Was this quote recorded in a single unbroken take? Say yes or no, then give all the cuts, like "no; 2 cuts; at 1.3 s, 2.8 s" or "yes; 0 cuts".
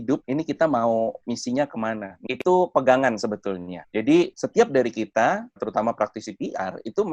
no; 3 cuts; at 2.2 s, 4.4 s, 5.6 s